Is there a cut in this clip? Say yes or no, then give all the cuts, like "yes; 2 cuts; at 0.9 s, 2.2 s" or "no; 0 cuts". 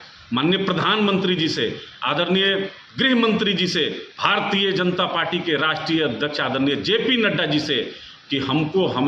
no; 0 cuts